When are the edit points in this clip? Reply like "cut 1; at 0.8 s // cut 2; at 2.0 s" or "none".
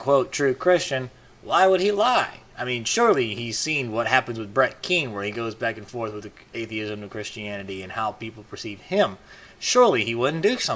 cut 1; at 8.6 s

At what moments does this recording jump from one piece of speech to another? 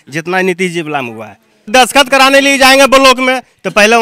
cut 1; at 1.5 s

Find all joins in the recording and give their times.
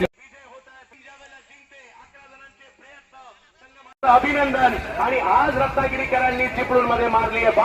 cut 1; at 0.9 s

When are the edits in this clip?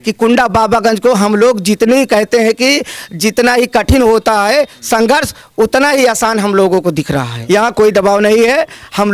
cut 1; at 7.3 s

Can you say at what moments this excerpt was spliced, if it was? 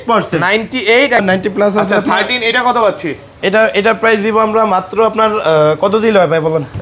cut 1; at 1.2 s

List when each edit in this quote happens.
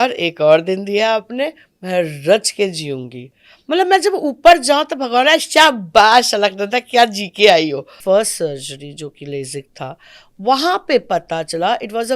cut 1; at 7.9 s

